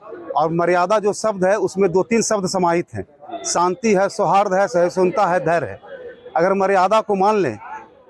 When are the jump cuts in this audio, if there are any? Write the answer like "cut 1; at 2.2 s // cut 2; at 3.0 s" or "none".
none